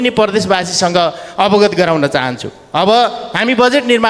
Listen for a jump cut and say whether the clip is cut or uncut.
uncut